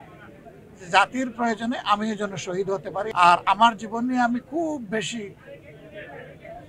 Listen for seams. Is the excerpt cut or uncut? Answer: cut